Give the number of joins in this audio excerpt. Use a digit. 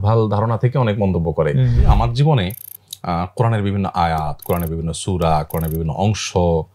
1